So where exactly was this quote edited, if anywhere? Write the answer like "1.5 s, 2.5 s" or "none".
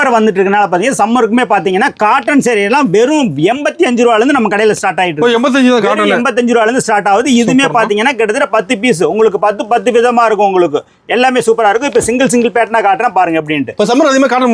none

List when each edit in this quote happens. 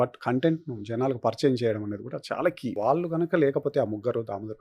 2.8 s

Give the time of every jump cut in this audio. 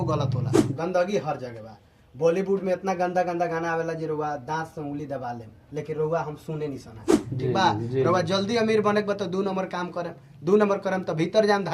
0.7 s, 7.2 s

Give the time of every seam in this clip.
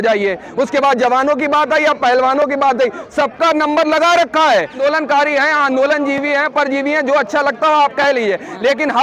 4.8 s

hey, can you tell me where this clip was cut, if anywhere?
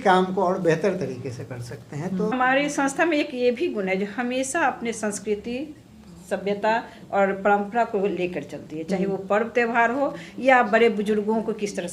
2.3 s

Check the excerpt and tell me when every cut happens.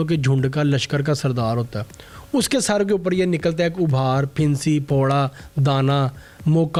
none

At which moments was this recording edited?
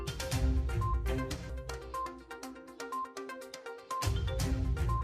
1.1 s

